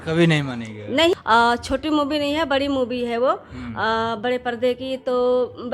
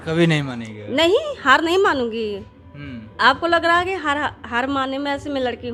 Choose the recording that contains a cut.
first; 1 cut; at 1.1 s

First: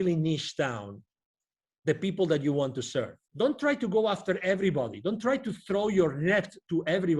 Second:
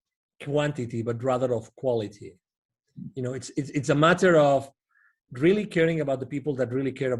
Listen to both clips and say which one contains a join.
first; 1 cut; at 3.2 s

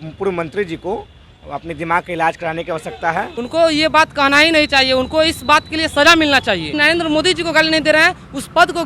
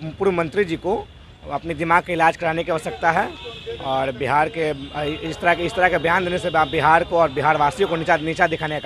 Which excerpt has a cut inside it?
first; 2 cuts; at 3.4 s, 6.7 s

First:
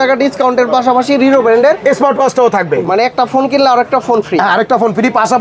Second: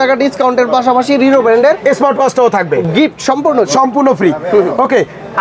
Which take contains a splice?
first; 1 cut; at 2.9 s

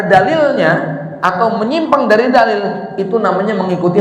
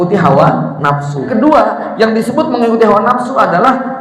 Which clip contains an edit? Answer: second; 1 cut; at 1.3 s

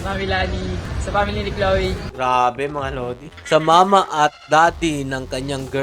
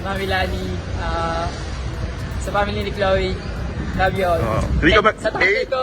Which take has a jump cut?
first; 3 cuts; at 0.9 s, 2.0 s, 3.3 s

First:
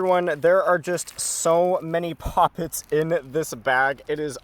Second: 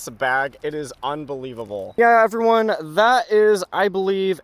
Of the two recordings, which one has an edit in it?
second; 1 cut; at 2.0 s

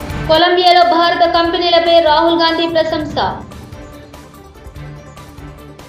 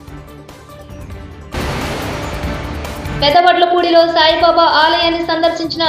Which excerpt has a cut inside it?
second; 2 cuts; at 1.5 s, 3.1 s

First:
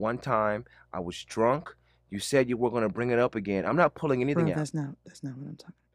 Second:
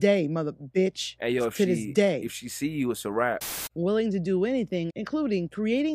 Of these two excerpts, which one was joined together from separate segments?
second; 2 cuts; at 3.4 s, 4.9 s

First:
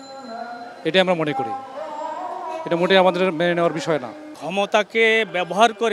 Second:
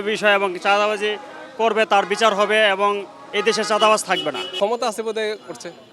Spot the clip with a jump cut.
second; 1 cut; at 4.5 s

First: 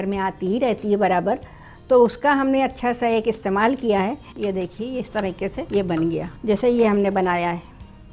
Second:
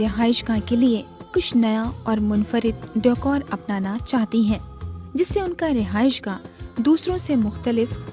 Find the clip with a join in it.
first; 3 cuts; at 4.3 s, 5.6 s, 6.3 s

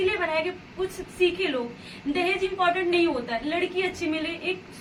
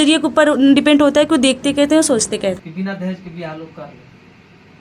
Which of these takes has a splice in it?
second; 1 cut; at 2.7 s

